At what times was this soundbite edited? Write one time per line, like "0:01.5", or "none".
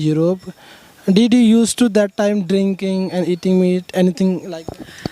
none